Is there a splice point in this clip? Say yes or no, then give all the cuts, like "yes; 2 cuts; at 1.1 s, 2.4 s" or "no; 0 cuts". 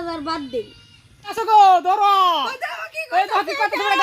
yes; 1 cut; at 1.3 s